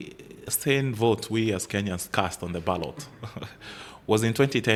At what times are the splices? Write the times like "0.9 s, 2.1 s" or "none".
none